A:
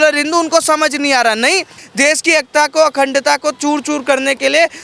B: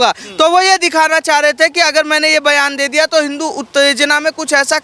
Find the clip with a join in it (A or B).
A